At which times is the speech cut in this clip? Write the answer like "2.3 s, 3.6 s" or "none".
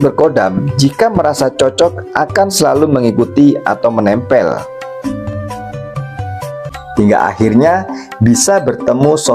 6.8 s